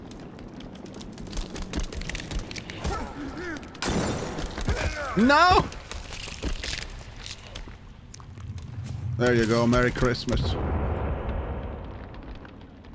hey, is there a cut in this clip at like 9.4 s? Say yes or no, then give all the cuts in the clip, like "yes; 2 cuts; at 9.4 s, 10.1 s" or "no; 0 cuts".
no; 1 cut; at 6.2 s